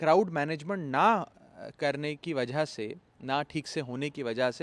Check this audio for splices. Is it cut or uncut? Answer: uncut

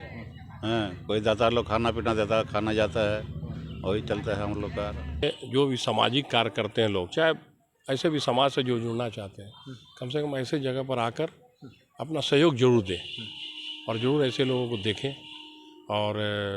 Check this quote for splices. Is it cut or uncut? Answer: cut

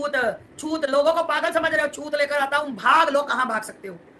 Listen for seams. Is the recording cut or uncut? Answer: cut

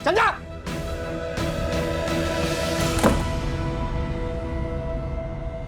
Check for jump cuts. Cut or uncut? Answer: uncut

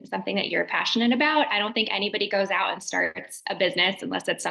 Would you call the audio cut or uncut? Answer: uncut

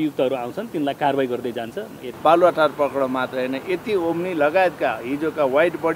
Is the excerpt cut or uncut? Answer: cut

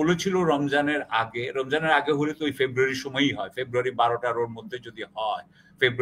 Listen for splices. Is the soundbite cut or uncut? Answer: uncut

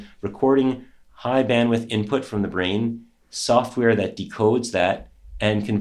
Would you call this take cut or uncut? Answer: uncut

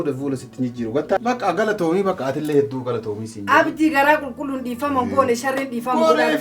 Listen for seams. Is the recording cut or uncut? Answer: cut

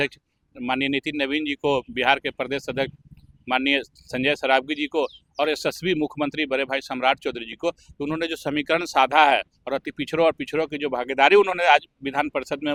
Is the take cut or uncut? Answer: uncut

